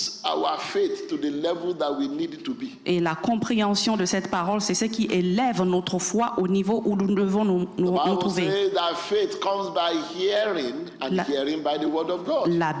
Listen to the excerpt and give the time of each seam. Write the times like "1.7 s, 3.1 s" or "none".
none